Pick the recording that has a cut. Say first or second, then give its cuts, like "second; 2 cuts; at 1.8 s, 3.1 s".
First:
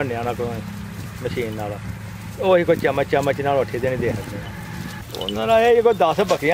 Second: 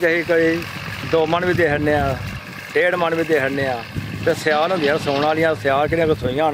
first; 1 cut; at 5.0 s